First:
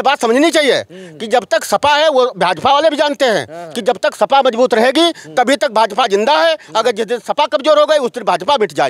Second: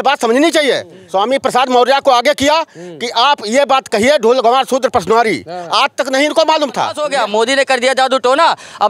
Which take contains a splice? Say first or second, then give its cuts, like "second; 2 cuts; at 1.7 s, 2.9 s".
second; 2 cuts; at 0.9 s, 7.0 s